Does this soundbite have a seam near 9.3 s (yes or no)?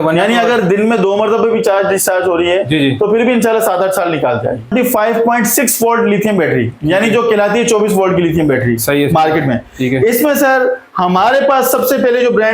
no